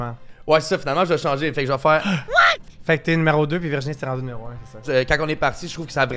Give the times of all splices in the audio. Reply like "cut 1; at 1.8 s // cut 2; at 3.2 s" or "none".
cut 1; at 2.6 s // cut 2; at 4.8 s